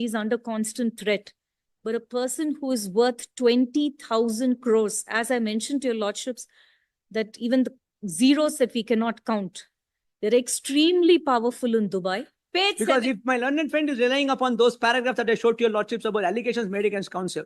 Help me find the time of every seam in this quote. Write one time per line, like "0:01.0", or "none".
0:12.3